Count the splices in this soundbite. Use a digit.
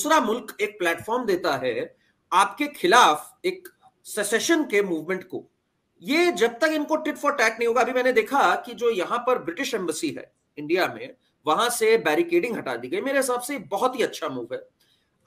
0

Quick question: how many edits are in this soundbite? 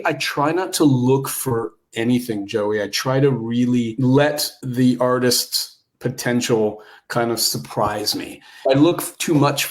3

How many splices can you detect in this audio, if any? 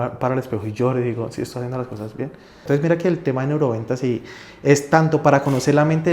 1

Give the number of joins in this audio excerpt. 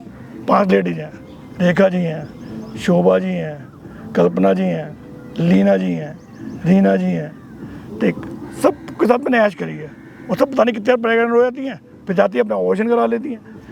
0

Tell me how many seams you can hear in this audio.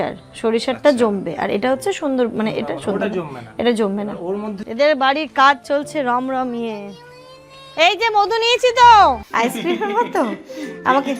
2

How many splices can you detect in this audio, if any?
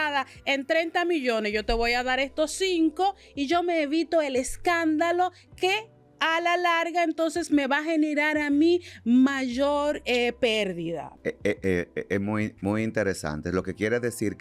1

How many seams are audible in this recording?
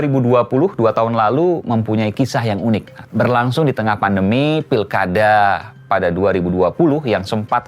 1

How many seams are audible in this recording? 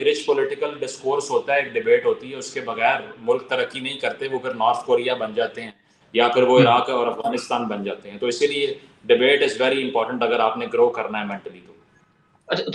0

